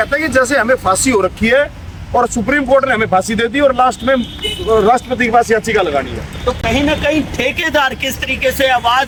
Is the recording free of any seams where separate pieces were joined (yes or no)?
yes